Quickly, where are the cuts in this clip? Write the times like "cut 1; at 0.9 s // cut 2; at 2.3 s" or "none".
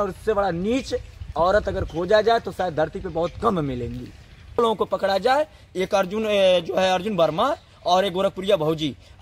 cut 1; at 4.6 s